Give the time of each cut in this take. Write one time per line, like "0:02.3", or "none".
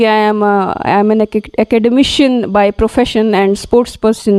none